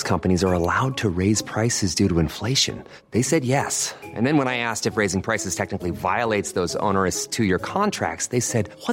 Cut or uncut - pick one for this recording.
uncut